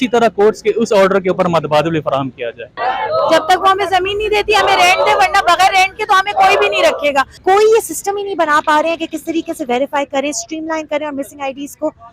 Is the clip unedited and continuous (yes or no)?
no